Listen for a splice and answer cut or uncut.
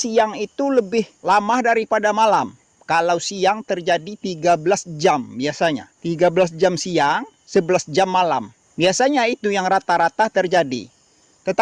cut